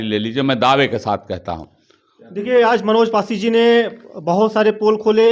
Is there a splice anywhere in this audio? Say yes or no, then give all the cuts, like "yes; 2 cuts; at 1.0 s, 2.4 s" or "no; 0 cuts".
no; 0 cuts